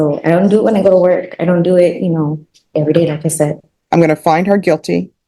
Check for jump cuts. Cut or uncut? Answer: cut